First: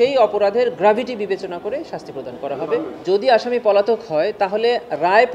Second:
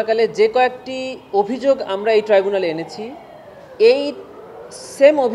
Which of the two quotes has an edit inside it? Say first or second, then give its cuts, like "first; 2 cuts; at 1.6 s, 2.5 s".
first; 1 cut; at 3.0 s